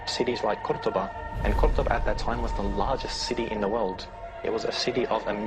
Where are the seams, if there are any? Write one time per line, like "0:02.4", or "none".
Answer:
none